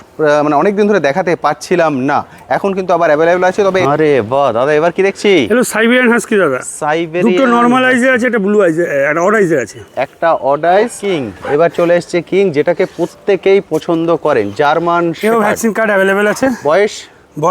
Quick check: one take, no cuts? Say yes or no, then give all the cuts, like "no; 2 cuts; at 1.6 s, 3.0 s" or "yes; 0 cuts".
no; 2 cuts; at 3.8 s, 11.0 s